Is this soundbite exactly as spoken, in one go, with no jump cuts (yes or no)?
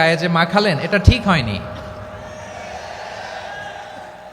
yes